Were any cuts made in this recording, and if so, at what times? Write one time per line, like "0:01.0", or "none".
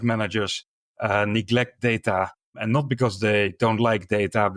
0:02.6